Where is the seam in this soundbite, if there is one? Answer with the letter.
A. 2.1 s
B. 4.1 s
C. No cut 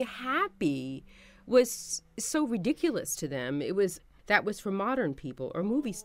B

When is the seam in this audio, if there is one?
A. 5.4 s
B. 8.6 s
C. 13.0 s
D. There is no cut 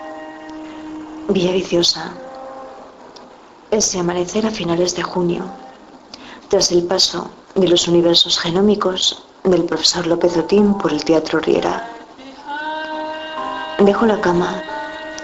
B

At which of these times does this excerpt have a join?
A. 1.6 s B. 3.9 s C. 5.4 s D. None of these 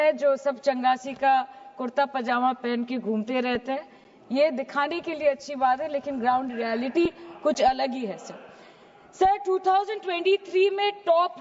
D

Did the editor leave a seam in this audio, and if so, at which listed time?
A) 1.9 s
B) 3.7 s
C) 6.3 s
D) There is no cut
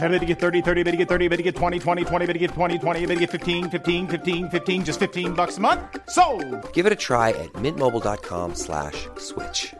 D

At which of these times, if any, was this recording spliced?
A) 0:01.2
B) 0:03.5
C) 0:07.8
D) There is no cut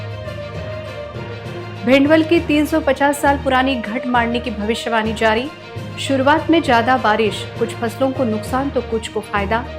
A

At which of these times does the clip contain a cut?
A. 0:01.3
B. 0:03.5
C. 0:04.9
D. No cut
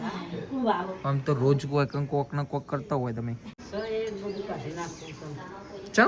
B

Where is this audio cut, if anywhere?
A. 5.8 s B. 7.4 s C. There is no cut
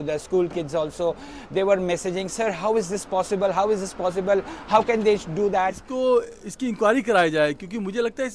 A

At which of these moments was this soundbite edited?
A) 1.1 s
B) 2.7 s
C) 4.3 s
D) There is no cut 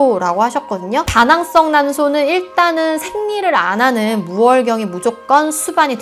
A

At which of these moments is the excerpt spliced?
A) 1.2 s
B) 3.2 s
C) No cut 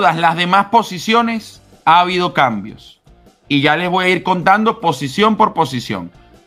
C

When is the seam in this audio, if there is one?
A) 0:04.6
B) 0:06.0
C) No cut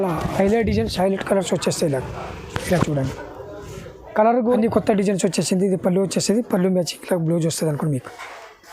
A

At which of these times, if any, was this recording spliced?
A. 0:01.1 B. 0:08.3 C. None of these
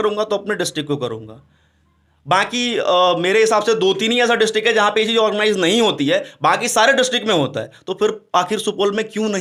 C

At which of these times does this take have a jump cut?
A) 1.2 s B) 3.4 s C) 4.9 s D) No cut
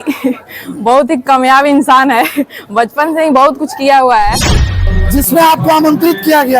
C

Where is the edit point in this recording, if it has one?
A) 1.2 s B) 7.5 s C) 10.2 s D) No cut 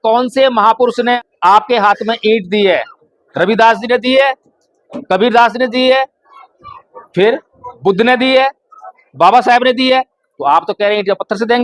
A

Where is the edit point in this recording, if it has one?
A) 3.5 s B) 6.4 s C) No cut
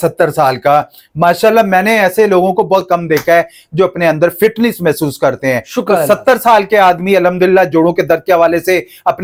C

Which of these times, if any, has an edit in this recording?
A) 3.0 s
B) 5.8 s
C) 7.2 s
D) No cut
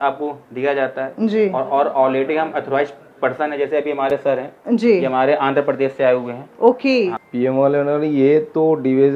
C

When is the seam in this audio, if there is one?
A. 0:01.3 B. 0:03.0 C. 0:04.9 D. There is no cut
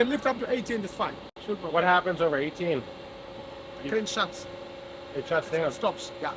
A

